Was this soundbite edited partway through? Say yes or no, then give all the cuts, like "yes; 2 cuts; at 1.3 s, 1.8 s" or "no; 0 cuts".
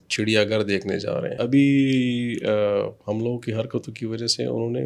yes; 1 cut; at 1.4 s